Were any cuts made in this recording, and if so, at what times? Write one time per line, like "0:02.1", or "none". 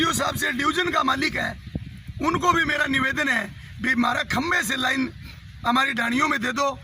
none